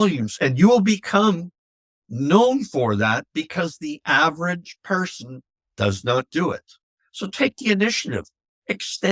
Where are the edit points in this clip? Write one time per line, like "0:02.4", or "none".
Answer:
none